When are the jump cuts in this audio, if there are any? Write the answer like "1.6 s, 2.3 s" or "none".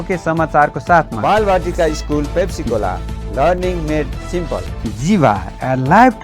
1.1 s, 4.7 s